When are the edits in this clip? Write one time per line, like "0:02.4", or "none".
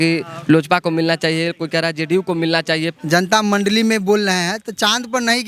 0:02.9

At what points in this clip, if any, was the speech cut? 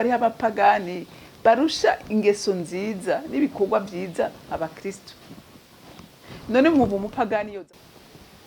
0:07.5

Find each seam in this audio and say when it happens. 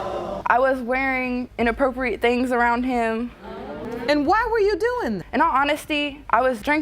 0:03.8

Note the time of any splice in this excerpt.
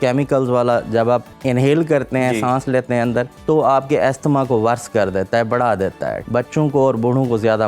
0:01.3
0:03.3
0:06.2

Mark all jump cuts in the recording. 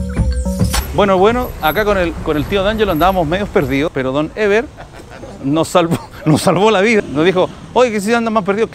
0:03.9
0:07.0

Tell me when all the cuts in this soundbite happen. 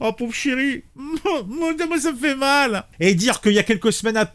0:02.8

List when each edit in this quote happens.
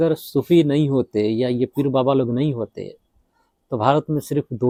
none

